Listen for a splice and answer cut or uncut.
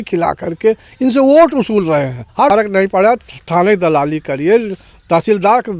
cut